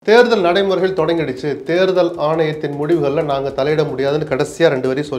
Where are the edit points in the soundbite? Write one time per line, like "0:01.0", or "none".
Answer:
none